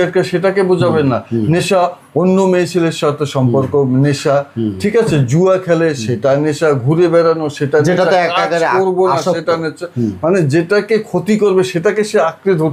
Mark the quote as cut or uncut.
uncut